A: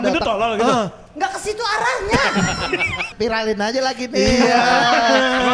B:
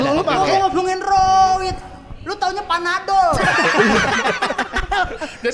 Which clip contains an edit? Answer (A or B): A